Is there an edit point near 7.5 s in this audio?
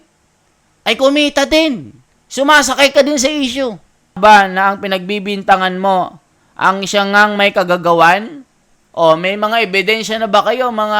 no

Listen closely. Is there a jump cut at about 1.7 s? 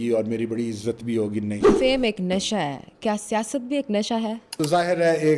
yes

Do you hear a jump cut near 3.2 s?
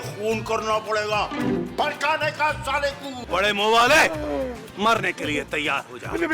yes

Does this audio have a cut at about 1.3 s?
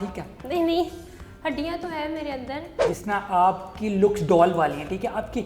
no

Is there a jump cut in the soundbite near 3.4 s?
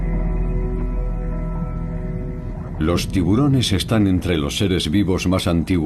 no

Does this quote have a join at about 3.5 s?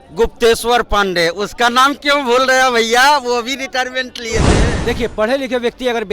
no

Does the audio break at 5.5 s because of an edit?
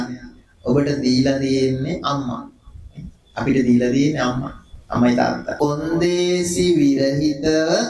yes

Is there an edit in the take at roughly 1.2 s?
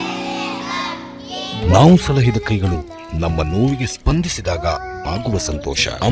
no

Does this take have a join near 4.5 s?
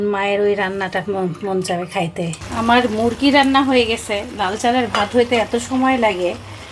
no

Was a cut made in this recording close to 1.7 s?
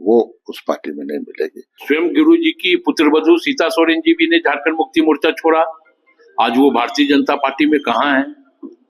yes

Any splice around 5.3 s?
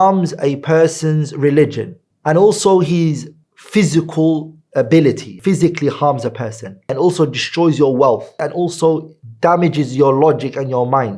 yes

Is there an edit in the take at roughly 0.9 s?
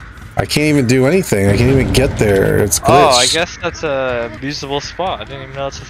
no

